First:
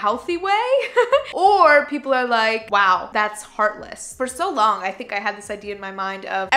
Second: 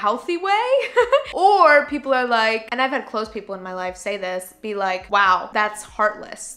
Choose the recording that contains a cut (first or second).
first